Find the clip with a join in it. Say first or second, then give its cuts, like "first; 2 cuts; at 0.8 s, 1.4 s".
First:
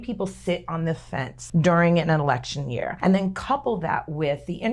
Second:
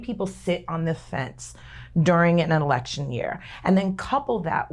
first; 2 cuts; at 1.4 s, 2.9 s